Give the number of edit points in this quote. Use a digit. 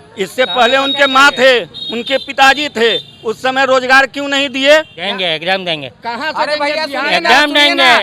1